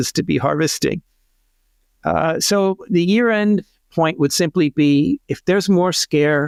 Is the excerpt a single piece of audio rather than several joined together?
yes; 0 cuts

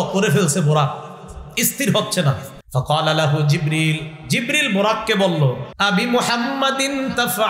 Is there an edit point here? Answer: yes; 2 cuts; at 2.5 s, 5.7 s

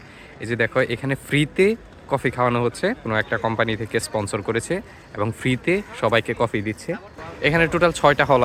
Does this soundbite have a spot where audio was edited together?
no; 0 cuts

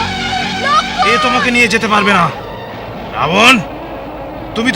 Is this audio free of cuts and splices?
no; 1 cut; at 1.0 s

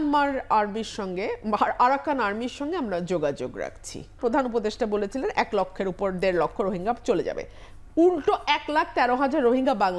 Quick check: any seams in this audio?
yes; 1 cut; at 4.1 s

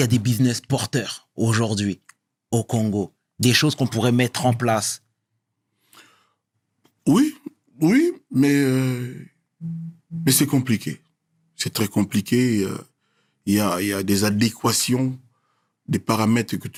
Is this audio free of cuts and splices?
yes; 0 cuts

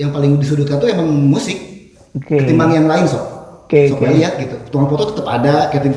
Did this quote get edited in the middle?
no; 0 cuts

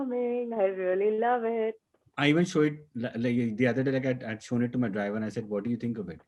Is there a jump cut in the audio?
yes; 1 cut; at 1.8 s

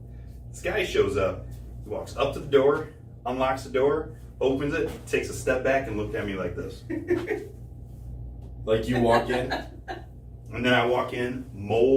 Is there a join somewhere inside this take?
no; 0 cuts

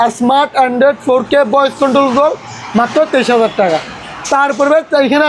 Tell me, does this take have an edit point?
no; 0 cuts

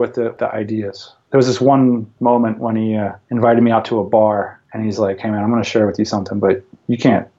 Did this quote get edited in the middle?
yes; 4 cuts; at 0.9 s, 2.1 s, 3.2 s, 4.6 s

